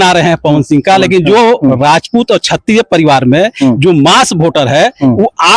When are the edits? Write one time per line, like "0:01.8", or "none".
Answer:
none